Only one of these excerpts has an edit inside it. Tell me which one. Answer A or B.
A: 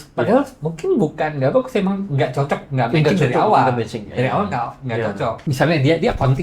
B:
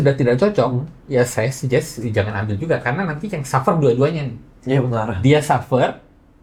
A